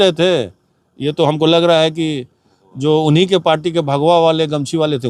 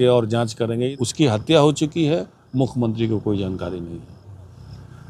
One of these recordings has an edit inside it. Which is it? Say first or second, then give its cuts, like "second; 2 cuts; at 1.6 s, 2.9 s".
second; 1 cut; at 0.9 s